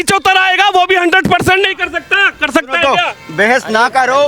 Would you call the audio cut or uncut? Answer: uncut